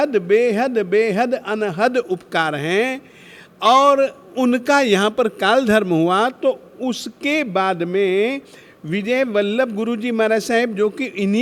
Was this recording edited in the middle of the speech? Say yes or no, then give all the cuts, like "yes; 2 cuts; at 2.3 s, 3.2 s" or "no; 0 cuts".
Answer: no; 0 cuts